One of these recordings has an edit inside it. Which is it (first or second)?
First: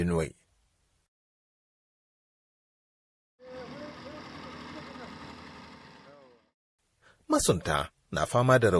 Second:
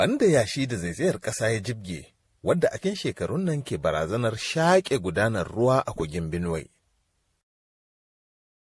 second